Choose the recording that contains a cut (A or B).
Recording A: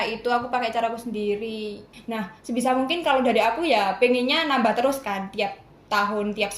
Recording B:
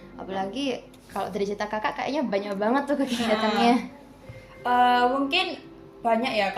A